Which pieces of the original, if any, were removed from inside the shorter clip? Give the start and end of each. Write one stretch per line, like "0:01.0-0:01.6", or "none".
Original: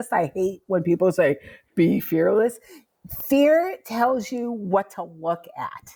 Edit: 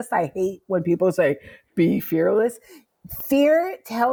none